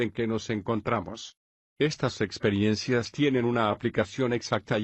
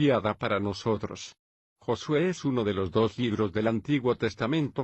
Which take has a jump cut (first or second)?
second